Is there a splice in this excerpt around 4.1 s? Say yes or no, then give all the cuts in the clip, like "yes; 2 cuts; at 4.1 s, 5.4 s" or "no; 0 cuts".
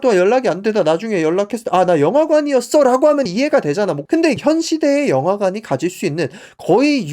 yes; 1 cut; at 4.1 s